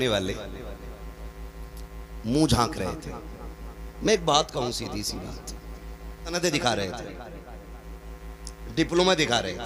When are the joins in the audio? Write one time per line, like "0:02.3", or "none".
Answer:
0:06.3